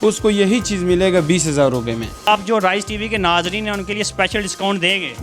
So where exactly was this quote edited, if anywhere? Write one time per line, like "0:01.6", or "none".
0:02.3